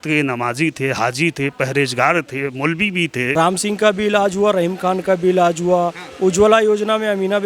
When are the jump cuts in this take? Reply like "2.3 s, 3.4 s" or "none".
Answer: 3.2 s